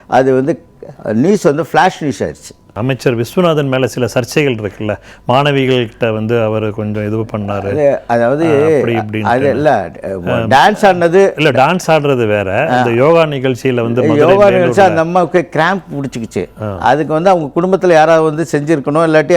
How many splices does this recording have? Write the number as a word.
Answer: one